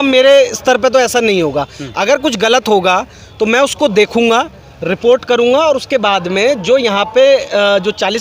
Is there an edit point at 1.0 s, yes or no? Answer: no